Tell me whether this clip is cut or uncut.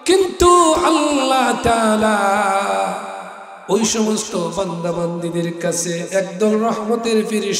uncut